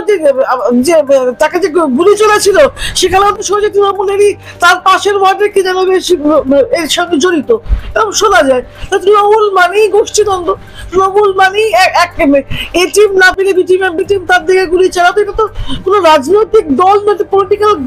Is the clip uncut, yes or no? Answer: yes